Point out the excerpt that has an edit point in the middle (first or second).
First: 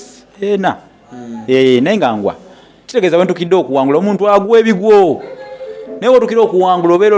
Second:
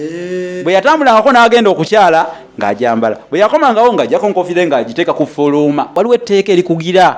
second